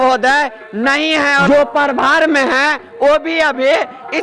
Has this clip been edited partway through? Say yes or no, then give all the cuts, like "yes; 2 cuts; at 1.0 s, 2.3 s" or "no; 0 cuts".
yes; 1 cut; at 1.4 s